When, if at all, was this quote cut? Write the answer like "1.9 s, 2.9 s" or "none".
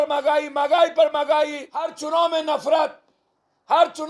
2.0 s